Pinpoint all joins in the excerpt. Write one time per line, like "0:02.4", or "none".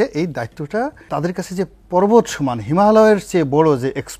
0:01.1